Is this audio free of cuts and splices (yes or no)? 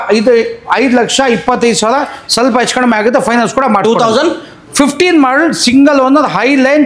yes